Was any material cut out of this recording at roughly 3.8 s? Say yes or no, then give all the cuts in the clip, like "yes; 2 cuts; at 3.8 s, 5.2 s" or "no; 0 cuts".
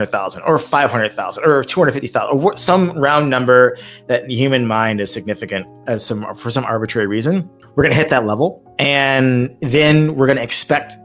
no; 2 cuts; at 7.6 s, 8.7 s